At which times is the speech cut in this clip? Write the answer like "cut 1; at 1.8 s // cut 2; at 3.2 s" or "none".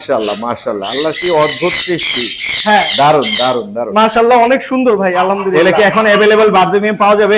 none